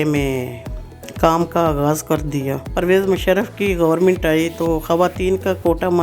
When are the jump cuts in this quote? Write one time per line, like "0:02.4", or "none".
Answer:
0:02.7